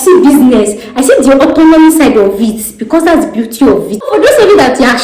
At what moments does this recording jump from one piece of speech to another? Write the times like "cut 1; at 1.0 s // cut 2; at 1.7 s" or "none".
cut 1; at 4.1 s